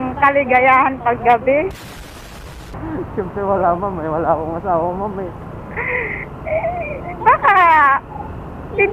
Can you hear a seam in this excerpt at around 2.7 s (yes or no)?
no